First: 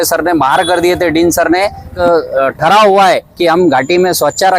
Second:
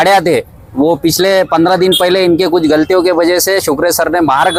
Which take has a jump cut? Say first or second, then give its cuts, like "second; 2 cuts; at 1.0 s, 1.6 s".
first; 1 cut; at 1.9 s